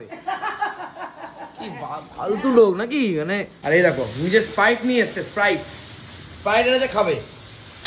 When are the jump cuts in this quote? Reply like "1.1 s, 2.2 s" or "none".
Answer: 3.6 s